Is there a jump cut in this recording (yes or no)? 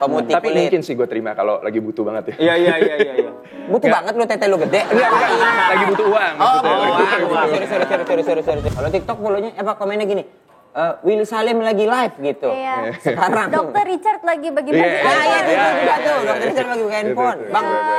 yes